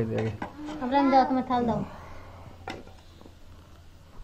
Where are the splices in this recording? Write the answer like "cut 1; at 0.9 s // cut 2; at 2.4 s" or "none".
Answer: none

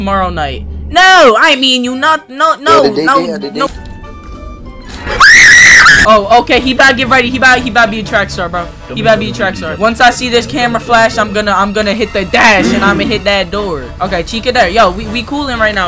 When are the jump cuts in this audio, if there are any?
cut 1; at 6.0 s

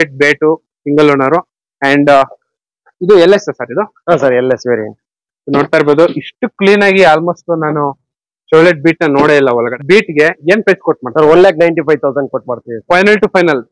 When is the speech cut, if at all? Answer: cut 1; at 9.7 s

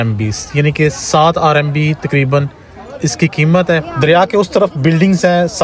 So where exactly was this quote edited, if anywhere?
cut 1; at 3.9 s

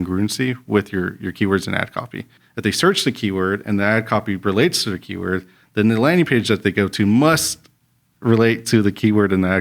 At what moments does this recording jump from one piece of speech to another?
cut 1; at 2.4 s

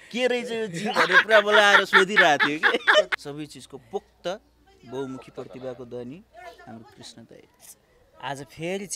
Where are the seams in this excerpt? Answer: cut 1; at 3.1 s

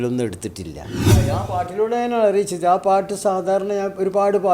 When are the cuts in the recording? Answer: cut 1; at 1.1 s

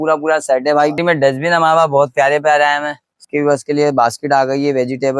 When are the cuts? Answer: cut 1; at 1.0 s // cut 2; at 3.3 s

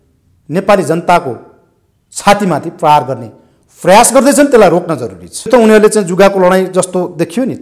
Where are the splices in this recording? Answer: cut 1; at 5.5 s

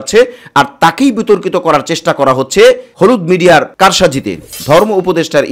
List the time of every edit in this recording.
cut 1; at 4.5 s

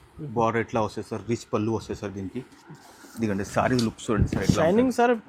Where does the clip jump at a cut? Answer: none

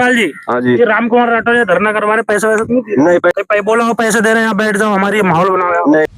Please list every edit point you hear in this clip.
cut 1; at 3.3 s

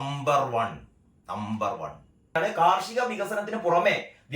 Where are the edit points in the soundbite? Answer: cut 1; at 2.3 s

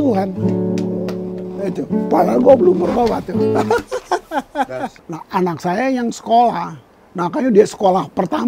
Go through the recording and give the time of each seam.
cut 1; at 5.0 s

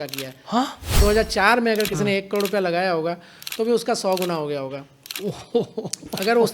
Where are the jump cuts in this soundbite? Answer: cut 1; at 0.9 s // cut 2; at 3.4 s

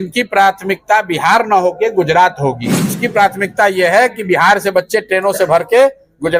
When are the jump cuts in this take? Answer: cut 1; at 3.0 s

